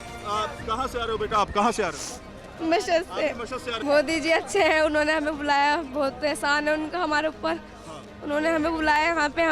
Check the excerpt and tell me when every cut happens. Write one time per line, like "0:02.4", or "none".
0:03.8